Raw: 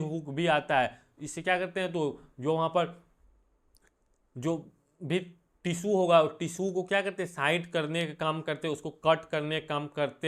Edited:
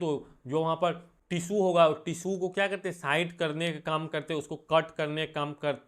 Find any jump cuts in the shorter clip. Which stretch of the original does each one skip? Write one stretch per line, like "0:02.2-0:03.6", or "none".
0:03.1-0:05.5